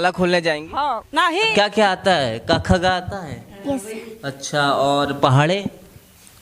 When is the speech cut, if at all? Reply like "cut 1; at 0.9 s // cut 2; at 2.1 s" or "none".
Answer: cut 1; at 1.5 s